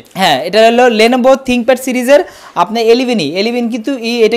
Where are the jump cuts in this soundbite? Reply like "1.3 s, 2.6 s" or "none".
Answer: none